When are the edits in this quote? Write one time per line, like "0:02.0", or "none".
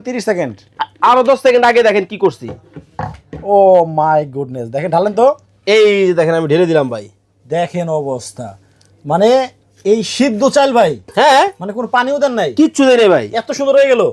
none